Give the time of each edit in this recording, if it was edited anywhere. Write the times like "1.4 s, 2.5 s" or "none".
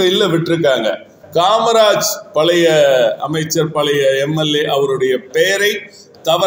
1.2 s